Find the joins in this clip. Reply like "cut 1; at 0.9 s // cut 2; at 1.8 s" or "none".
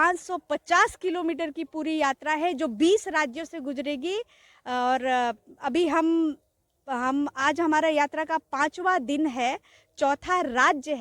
none